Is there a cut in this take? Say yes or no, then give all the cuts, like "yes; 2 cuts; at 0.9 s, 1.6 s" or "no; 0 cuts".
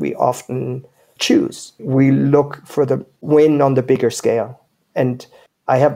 yes; 1 cut; at 3.1 s